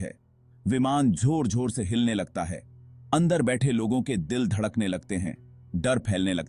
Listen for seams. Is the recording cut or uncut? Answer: uncut